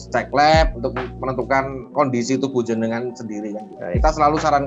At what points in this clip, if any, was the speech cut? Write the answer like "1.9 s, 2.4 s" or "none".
none